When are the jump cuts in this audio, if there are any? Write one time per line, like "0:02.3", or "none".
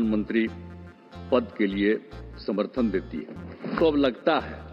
0:03.8